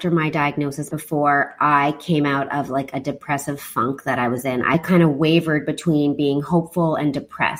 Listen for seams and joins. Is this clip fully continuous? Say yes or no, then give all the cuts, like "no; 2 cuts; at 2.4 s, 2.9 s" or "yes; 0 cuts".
no; 2 cuts; at 0.9 s, 4.7 s